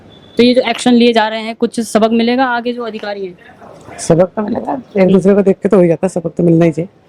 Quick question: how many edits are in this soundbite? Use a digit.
0